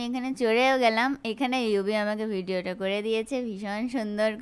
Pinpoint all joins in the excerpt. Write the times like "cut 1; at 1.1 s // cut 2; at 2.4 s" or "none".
none

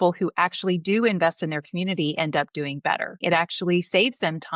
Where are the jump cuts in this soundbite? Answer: cut 1; at 3.2 s

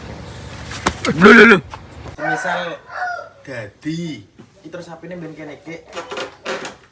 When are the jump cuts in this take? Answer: cut 1; at 2.1 s

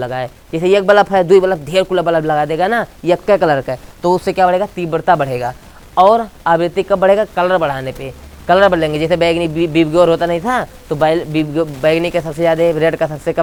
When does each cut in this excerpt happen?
none

